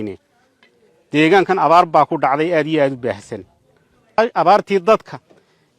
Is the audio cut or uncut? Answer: cut